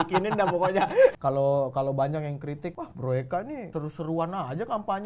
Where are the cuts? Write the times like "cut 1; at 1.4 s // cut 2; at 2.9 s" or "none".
cut 1; at 1.2 s // cut 2; at 2.8 s // cut 3; at 3.6 s